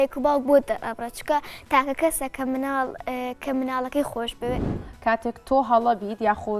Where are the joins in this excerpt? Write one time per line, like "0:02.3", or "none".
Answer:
0:04.6

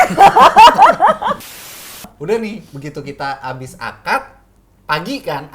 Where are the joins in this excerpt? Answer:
0:01.8

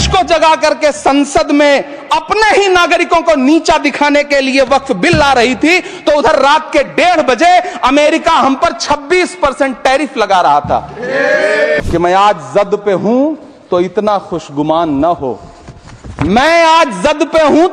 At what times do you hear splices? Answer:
0:11.8

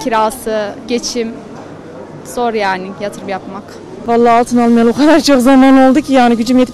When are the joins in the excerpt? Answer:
0:03.9

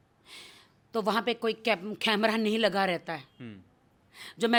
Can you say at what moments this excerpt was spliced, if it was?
none

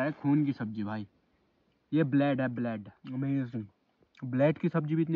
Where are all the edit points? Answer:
0:02.9

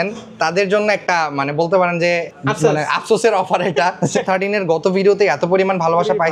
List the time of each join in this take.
0:02.3
0:04.2

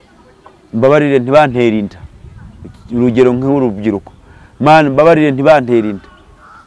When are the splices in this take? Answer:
none

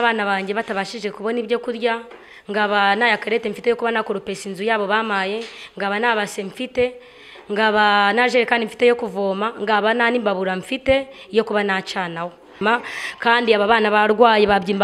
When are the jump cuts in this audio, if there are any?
0:12.5

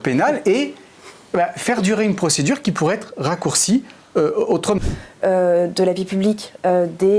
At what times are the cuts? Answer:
0:04.8

